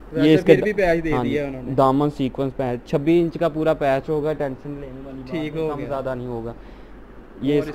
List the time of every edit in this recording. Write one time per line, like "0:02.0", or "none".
none